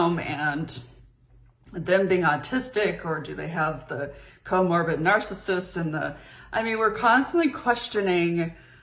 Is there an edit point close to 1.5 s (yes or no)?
no